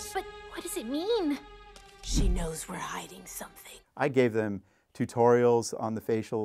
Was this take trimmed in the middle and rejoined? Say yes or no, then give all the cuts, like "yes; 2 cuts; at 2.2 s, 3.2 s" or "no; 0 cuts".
yes; 1 cut; at 4.0 s